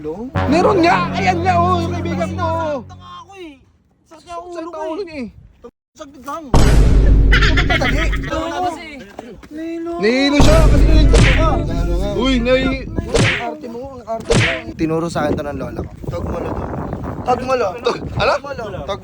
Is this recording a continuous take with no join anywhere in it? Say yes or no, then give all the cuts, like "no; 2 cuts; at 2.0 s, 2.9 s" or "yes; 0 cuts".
no; 3 cuts; at 8.3 s, 14.7 s, 15.9 s